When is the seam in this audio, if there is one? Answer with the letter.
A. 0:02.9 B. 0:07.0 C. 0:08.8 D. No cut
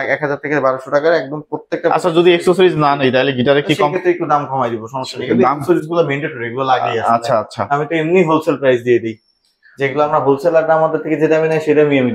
D